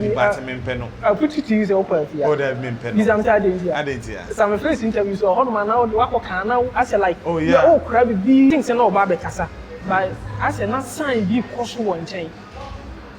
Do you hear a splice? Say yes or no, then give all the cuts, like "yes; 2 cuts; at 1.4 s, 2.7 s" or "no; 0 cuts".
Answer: yes; 1 cut; at 8.5 s